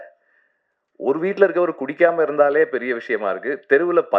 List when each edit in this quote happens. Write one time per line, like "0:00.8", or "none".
none